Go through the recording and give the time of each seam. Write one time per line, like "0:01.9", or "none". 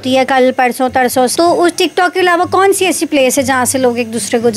0:01.3